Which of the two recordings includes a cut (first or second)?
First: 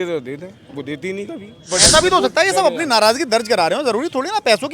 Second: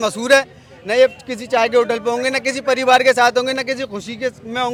first